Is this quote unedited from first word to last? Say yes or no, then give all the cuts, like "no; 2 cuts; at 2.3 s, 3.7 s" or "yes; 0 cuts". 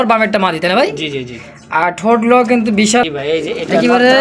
no; 1 cut; at 3.1 s